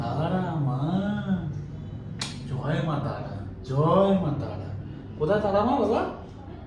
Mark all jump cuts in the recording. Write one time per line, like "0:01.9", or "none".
none